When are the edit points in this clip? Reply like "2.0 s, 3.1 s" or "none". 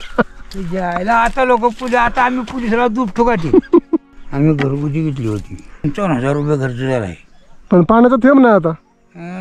4.0 s, 5.8 s